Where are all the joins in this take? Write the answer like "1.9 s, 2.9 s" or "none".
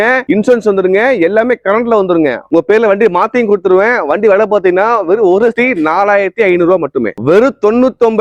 2.5 s, 7.2 s